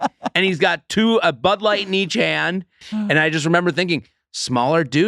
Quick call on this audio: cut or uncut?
cut